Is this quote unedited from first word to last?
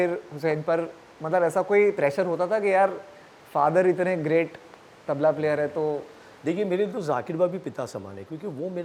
yes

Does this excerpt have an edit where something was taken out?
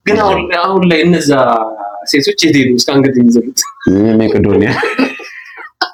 no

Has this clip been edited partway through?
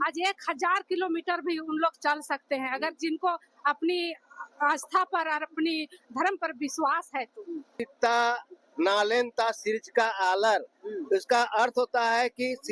yes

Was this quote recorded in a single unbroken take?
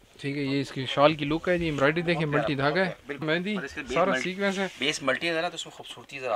no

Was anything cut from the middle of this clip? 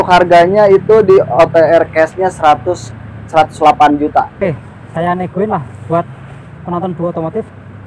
yes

